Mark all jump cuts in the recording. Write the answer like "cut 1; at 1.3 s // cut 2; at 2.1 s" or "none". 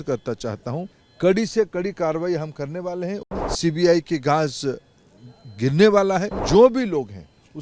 cut 1; at 1.0 s // cut 2; at 3.2 s // cut 3; at 6.3 s